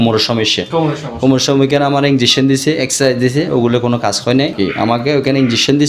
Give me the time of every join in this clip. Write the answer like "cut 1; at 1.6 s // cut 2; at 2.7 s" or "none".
cut 1; at 4.5 s